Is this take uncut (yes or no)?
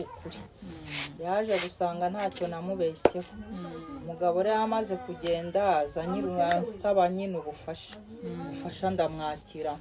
yes